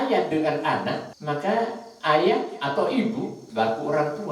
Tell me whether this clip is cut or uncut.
cut